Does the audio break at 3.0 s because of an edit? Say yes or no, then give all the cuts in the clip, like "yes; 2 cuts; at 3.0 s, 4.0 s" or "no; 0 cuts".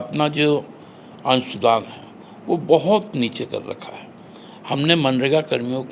no; 0 cuts